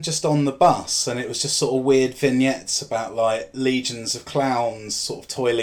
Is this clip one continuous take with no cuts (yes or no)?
yes